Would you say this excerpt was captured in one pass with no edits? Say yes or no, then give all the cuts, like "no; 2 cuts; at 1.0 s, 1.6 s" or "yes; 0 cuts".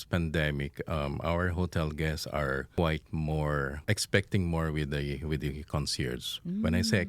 no; 2 cuts; at 2.7 s, 3.8 s